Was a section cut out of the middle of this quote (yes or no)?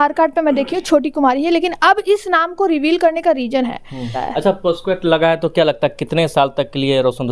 yes